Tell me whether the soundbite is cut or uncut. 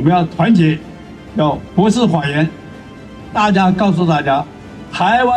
uncut